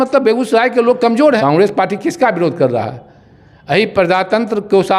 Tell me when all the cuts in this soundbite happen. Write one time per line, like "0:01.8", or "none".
0:01.4